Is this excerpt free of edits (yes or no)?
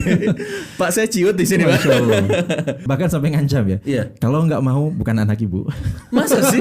no